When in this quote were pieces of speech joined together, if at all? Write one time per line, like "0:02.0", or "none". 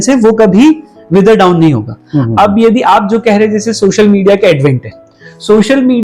none